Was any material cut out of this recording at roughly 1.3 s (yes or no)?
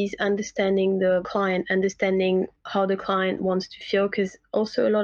yes